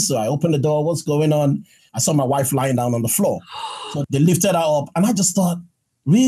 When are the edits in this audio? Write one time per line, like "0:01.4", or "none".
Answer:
0:01.8
0:03.9